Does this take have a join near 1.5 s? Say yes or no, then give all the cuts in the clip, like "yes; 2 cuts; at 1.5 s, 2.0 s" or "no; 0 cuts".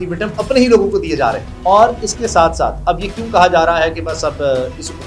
yes; 1 cut; at 1.5 s